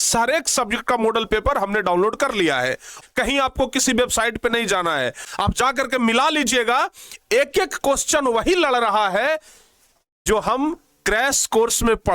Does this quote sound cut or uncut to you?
cut